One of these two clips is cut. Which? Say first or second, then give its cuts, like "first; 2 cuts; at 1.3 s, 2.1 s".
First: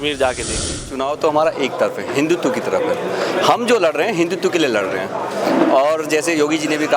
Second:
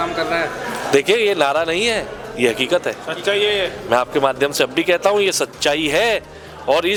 first; 1 cut; at 0.9 s